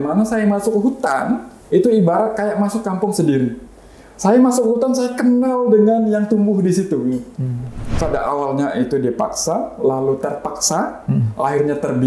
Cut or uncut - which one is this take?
cut